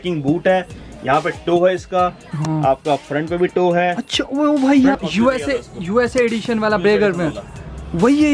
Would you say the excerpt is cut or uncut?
cut